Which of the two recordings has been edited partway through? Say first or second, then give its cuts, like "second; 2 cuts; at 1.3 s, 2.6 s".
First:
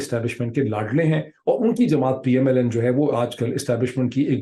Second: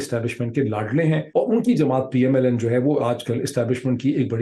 second; 1 cut; at 1.2 s